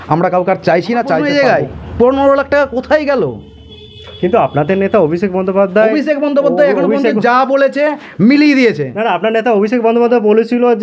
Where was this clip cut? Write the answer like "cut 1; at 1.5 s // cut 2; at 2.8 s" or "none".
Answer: cut 1; at 1.3 s